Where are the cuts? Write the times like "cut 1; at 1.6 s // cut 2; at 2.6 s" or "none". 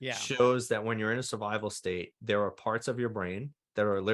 none